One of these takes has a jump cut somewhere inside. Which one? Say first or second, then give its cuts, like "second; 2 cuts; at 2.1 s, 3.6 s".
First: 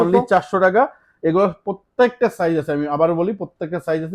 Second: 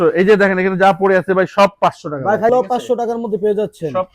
second; 1 cut; at 2.5 s